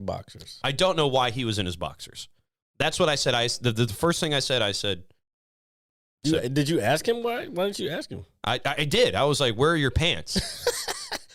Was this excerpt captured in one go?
yes; 0 cuts

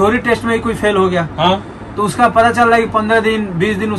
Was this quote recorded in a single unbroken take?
yes; 0 cuts

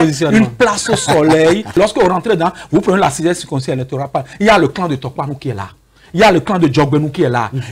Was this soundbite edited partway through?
yes; 1 cut; at 1.8 s

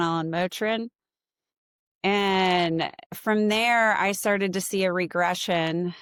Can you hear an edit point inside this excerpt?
no; 0 cuts

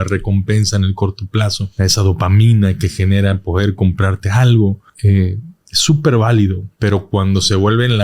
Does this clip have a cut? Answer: yes; 3 cuts; at 1.6 s, 4.9 s, 6.7 s

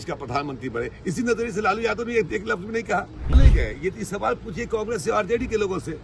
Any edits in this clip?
yes; 1 cut; at 3.3 s

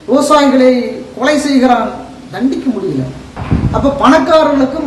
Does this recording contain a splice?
yes; 1 cut; at 3.3 s

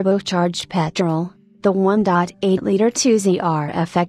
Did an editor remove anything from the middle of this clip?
yes; 1 cut; at 3.0 s

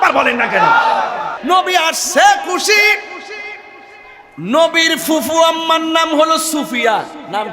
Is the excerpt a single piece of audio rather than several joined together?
no; 1 cut; at 1.3 s

